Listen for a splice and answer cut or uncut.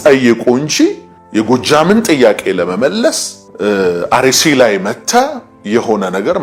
uncut